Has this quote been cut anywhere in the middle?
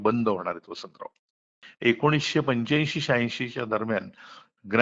yes; 1 cut; at 1.6 s

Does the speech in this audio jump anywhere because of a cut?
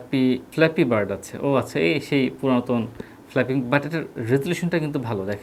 no; 0 cuts

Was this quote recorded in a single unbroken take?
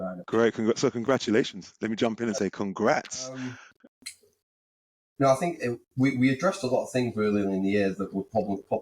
no; 1 cut; at 3.7 s

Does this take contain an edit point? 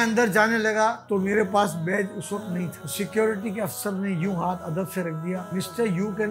yes; 3 cuts; at 1.0 s, 2.8 s, 5.5 s

